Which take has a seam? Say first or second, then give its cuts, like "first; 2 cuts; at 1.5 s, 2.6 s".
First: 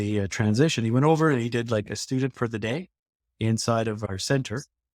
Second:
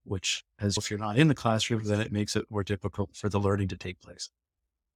first; 1 cut; at 4.1 s